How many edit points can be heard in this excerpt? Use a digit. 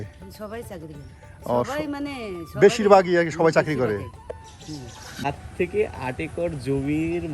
1